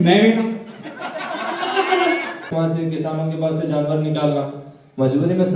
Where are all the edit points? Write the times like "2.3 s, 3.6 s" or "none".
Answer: 2.5 s